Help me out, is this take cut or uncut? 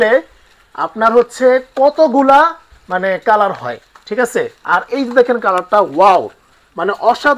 uncut